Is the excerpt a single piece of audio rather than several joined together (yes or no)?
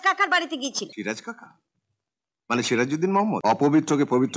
no